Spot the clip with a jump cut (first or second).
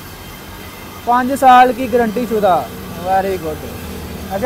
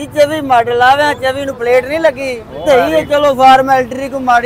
second